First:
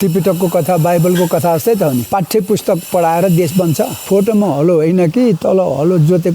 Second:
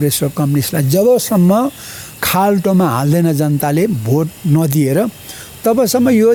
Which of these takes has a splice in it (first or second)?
first